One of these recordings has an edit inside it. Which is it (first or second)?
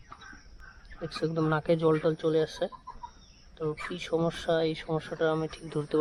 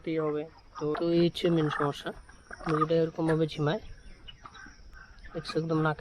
second